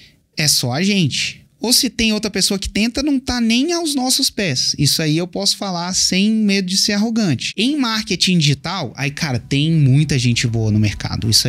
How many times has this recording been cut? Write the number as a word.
one